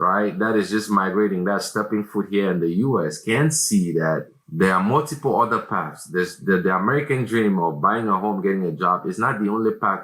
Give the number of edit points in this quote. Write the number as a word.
zero